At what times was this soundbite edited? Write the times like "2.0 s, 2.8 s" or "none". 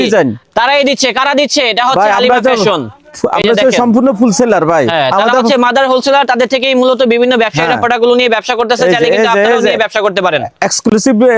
none